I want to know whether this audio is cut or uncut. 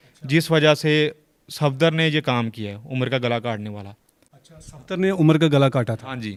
uncut